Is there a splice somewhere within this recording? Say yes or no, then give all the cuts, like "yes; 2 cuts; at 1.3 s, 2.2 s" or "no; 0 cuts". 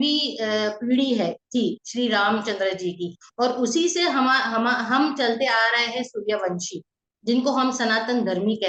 no; 0 cuts